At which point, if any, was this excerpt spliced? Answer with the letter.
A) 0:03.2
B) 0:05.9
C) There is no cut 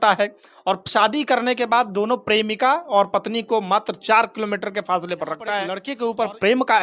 B